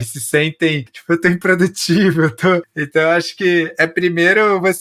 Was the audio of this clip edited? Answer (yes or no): no